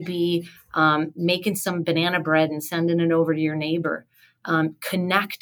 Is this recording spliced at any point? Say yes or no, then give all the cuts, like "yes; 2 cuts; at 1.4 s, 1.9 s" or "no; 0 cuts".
no; 0 cuts